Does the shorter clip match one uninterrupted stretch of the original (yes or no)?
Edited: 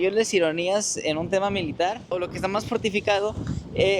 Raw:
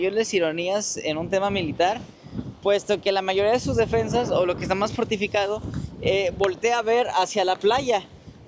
no